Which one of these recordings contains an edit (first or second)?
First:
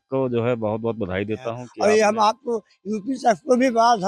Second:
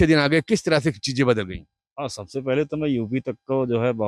first